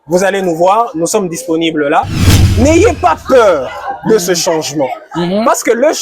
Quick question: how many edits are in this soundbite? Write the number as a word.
one